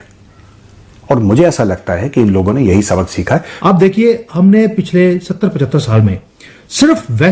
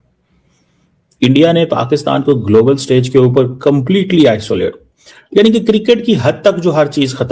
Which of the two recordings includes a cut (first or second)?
first